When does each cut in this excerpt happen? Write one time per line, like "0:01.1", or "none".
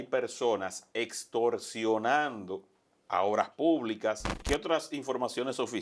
0:04.3